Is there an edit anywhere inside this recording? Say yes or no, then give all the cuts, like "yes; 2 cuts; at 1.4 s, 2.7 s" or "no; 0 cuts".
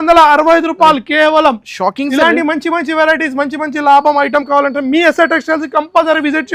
no; 0 cuts